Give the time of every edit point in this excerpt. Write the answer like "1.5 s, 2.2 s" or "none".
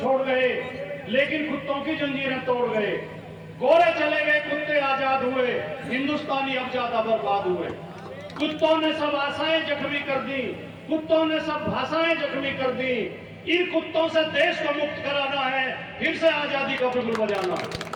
none